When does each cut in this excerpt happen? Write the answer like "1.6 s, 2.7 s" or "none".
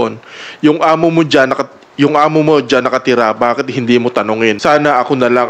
4.6 s

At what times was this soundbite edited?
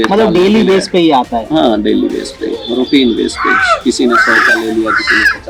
none

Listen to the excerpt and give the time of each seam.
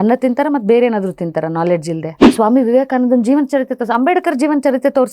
2.2 s

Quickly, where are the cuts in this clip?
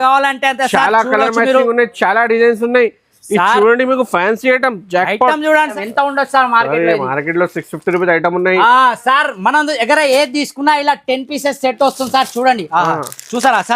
5.7 s

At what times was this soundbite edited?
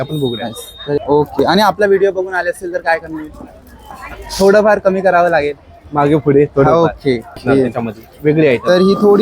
1.0 s, 7.4 s

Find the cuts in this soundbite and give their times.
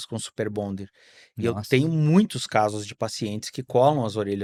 none

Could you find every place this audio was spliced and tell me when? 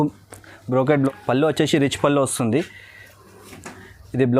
0.9 s

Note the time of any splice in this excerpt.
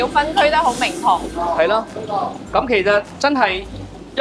none

